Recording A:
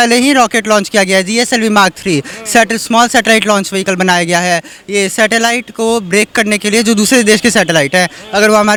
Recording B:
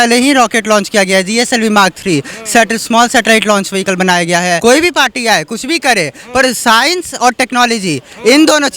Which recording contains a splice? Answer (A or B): B